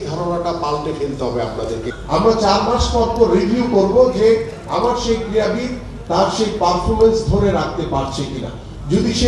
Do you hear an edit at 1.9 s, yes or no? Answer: yes